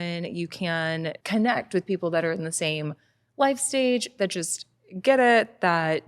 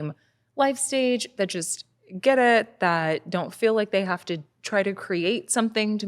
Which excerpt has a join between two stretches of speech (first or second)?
first